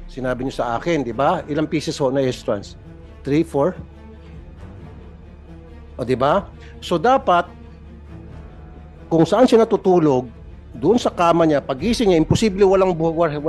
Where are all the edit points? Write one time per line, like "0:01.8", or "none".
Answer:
0:04.0
0:05.9
0:07.6
0:09.1

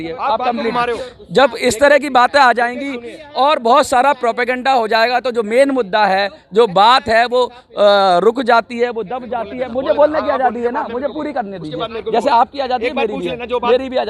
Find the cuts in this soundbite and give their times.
none

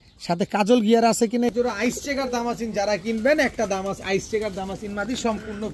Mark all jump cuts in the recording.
0:01.5

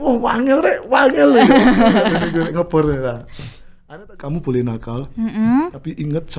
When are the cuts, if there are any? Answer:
0:03.8

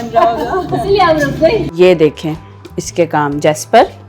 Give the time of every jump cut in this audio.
0:01.6

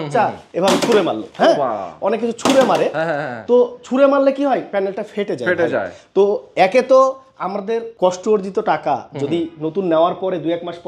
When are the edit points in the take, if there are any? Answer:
none

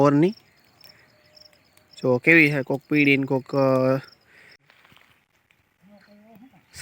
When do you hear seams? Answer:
0:04.6

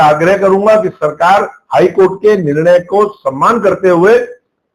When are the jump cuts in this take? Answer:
none

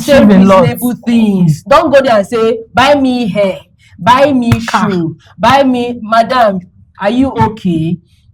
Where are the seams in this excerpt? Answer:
none

